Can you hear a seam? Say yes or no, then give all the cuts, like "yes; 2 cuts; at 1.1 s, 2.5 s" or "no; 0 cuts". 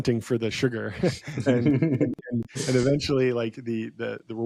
no; 0 cuts